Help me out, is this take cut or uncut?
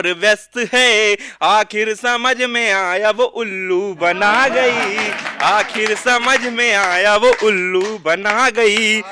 uncut